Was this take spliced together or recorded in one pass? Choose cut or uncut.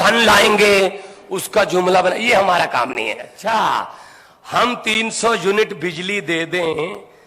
cut